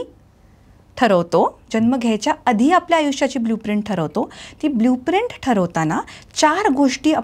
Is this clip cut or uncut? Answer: uncut